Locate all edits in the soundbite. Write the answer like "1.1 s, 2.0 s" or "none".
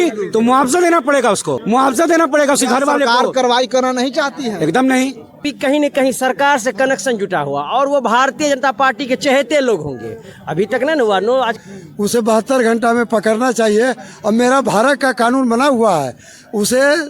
5.5 s, 11.6 s